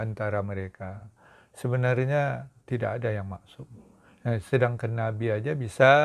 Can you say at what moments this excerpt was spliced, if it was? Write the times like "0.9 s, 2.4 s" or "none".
1.1 s, 2.5 s